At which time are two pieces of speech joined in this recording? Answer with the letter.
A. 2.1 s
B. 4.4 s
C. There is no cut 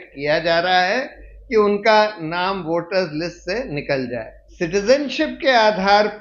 B